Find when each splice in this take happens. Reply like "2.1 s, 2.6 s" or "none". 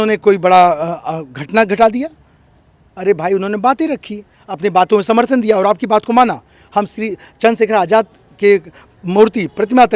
none